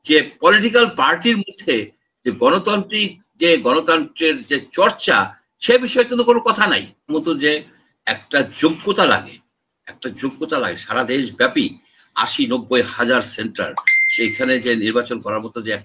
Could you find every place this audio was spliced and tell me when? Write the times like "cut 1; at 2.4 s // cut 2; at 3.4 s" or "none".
cut 1; at 7.1 s